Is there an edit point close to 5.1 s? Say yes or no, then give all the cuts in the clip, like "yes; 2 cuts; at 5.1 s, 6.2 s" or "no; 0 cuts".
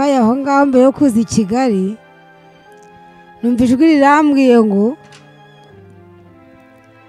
no; 2 cuts; at 2.0 s, 3.4 s